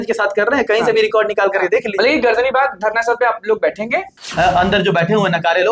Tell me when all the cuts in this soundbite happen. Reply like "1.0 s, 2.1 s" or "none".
4.2 s